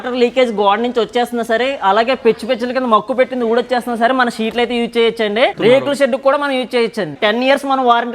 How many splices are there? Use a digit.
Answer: 2